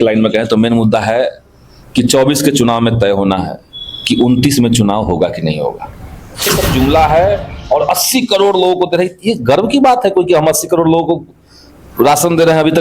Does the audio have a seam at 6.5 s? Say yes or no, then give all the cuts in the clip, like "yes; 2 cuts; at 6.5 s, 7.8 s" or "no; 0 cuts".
yes; 1 cut; at 6.5 s